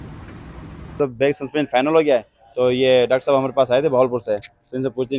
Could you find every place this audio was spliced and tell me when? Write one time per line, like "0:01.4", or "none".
0:01.0